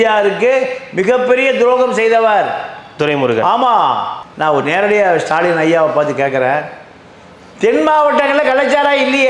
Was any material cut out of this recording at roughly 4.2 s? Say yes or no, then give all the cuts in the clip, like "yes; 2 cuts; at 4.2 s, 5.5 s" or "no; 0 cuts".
yes; 1 cut; at 4.2 s